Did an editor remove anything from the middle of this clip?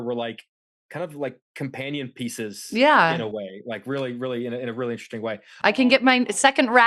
no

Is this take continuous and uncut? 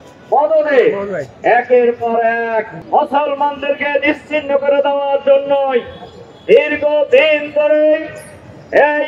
no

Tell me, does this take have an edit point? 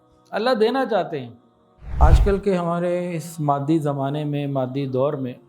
yes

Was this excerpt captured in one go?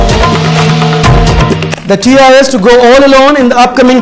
no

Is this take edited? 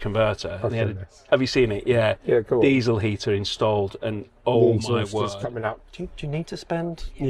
yes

